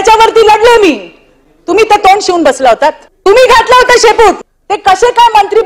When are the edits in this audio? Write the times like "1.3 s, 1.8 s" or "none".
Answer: 3.1 s, 4.4 s